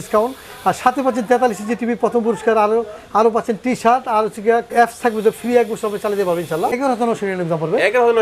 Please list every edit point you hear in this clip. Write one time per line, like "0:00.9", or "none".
0:04.7
0:06.7

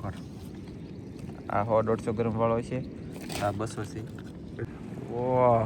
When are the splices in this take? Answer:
0:04.7

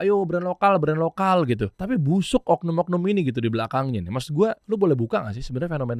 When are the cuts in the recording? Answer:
0:01.7
0:04.6

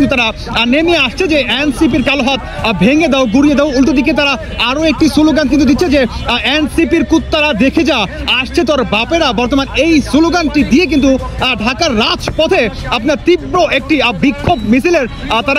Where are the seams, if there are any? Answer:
none

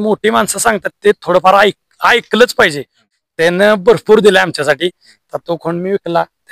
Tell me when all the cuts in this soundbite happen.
0:03.0

